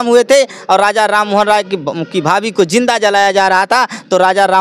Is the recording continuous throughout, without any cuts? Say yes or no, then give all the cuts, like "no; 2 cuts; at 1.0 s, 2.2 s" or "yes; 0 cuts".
yes; 0 cuts